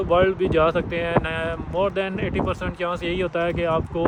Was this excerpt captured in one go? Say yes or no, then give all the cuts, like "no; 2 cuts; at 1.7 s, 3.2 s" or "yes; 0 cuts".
yes; 0 cuts